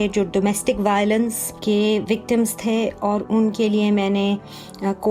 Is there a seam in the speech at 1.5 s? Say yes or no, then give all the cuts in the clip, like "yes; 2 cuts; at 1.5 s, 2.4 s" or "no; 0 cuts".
yes; 1 cut; at 1.5 s